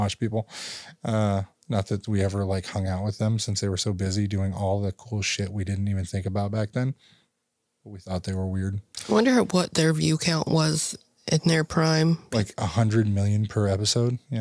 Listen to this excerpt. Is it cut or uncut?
uncut